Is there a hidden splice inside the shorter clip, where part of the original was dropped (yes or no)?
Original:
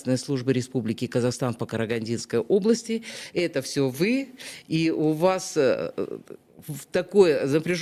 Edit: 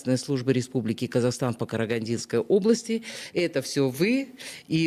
no